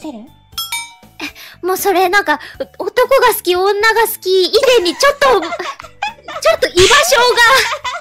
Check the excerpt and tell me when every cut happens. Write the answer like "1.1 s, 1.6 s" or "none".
none

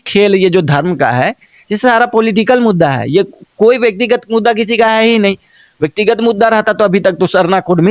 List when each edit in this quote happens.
none

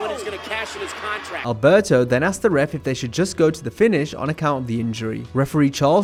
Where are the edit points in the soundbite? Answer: none

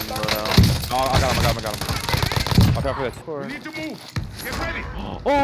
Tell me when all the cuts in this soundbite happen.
3.2 s

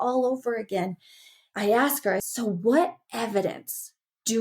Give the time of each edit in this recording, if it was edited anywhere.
1.4 s, 2.3 s

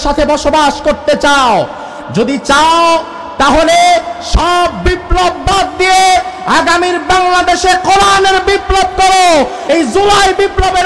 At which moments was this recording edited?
9.6 s

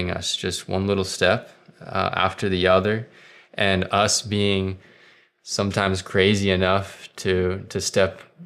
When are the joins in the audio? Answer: none

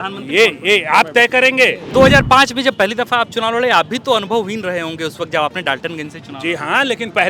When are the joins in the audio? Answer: 1.8 s

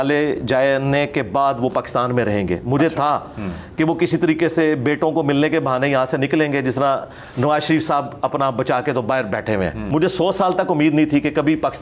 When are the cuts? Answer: 9.8 s

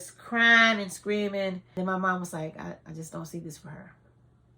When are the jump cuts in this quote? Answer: 1.6 s

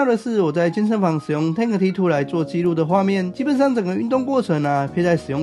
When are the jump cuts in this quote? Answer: none

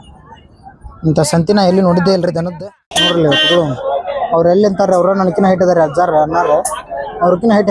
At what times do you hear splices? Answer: 2.5 s

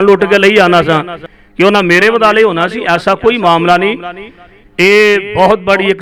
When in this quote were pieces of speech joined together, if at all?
none

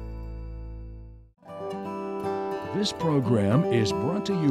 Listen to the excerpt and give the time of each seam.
1.6 s, 2.7 s

